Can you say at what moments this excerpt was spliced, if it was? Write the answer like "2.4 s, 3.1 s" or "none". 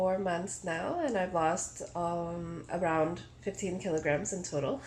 none